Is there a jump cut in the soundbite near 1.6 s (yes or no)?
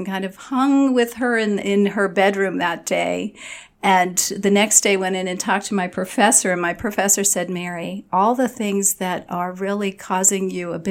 yes